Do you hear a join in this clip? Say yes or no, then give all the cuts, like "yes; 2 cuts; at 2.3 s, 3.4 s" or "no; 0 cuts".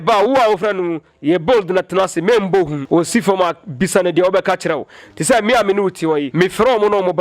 yes; 2 cuts; at 2.8 s, 6.3 s